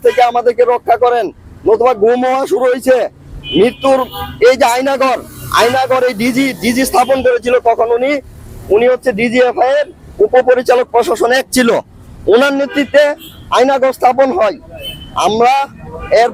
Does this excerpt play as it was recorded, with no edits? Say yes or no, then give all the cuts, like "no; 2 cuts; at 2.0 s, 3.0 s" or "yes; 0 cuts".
yes; 0 cuts